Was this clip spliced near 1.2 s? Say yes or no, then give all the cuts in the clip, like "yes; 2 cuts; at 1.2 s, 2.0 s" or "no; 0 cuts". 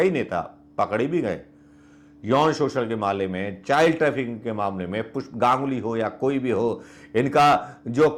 no; 0 cuts